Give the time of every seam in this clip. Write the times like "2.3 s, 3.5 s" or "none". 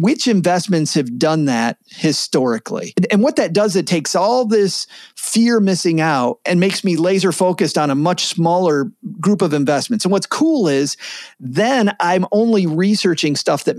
3.0 s, 6.4 s